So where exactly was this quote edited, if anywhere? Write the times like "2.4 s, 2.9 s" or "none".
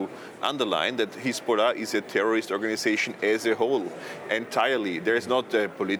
none